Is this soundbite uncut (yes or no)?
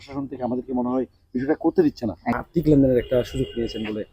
no